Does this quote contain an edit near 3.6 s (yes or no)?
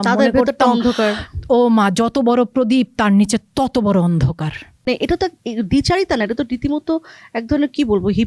no